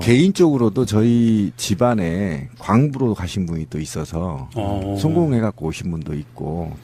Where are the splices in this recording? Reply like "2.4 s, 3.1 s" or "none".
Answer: 3.5 s